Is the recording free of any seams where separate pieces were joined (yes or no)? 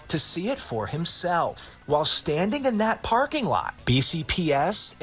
no